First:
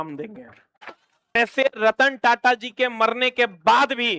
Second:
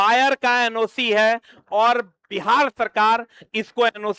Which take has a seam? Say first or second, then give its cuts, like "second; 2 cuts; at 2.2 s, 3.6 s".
first; 1 cut; at 1.4 s